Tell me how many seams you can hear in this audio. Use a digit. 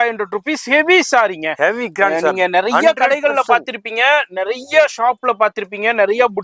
0